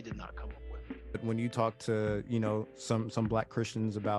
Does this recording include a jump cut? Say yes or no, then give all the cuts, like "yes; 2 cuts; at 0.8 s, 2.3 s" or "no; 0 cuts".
yes; 1 cut; at 1.2 s